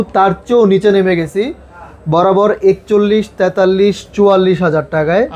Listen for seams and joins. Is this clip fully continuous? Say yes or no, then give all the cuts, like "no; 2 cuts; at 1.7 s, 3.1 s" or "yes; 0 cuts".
yes; 0 cuts